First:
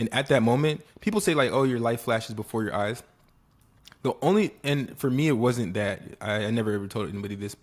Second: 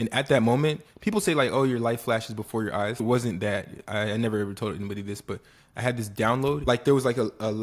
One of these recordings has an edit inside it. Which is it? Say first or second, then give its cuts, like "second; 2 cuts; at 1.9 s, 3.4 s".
second; 2 cuts; at 3.0 s, 6.6 s